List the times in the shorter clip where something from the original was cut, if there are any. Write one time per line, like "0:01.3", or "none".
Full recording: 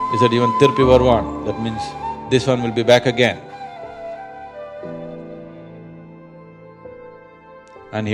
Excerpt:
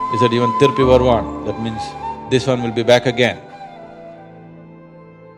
0:04.0

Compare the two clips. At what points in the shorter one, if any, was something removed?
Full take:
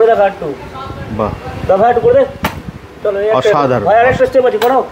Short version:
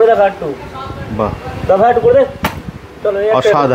none

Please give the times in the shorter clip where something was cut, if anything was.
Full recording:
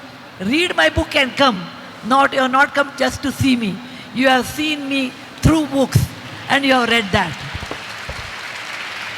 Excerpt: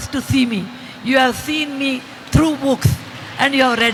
none

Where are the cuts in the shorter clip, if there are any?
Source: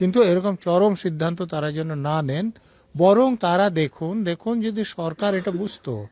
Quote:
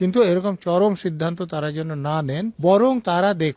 0:02.5

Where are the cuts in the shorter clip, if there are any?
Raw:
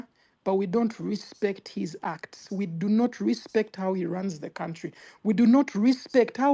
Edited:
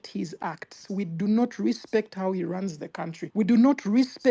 0:03.2

